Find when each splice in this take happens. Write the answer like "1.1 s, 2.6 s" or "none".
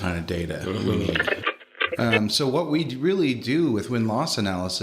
1.4 s